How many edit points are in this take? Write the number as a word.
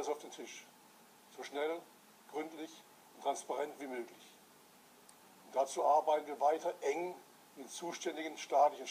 one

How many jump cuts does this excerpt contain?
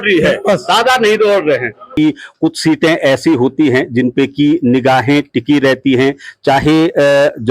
one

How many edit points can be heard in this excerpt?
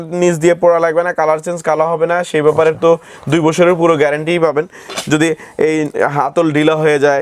zero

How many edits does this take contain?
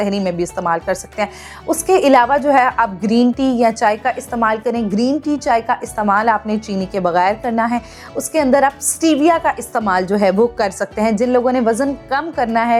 zero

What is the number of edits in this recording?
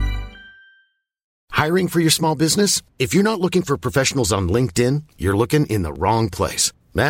one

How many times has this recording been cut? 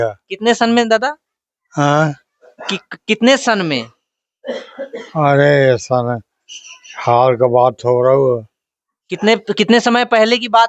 zero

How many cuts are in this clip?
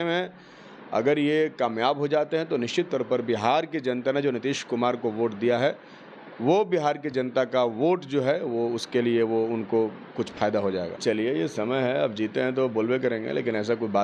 one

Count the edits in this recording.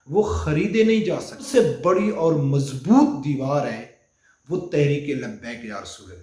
one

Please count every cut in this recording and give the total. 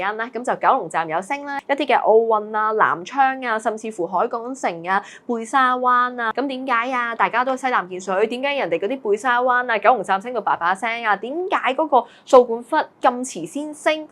two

